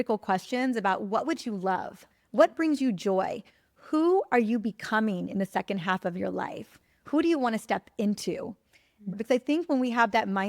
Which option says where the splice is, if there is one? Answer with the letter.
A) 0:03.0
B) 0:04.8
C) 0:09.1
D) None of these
C